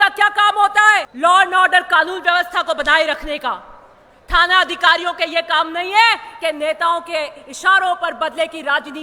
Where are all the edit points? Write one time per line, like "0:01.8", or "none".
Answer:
0:01.1